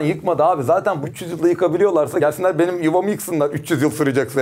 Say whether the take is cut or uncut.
cut